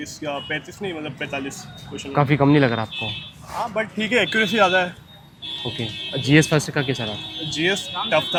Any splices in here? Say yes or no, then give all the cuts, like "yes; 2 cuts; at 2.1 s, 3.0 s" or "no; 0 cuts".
no; 0 cuts